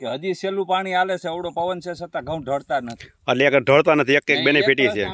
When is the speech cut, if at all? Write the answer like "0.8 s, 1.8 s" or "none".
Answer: none